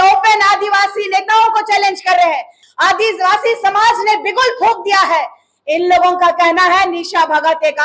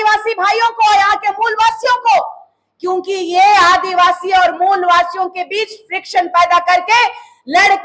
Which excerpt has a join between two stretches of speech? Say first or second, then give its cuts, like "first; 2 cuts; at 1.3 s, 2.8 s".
first; 1 cut; at 2.5 s